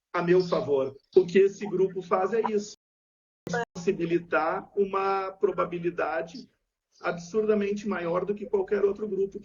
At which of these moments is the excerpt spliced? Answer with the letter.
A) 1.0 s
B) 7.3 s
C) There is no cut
A